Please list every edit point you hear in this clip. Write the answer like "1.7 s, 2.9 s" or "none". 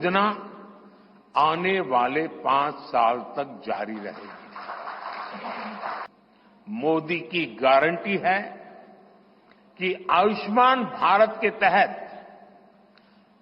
6.1 s